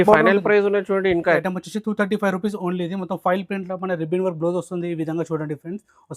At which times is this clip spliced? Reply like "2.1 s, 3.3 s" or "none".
1.4 s